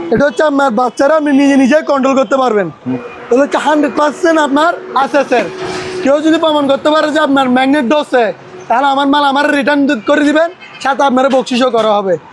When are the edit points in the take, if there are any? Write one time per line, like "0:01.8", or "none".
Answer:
0:03.0